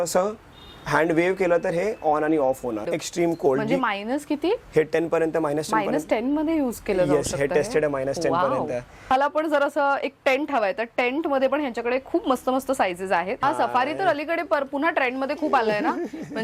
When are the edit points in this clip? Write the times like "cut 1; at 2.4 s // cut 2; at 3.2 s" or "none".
cut 1; at 2.9 s // cut 2; at 9.1 s // cut 3; at 13.4 s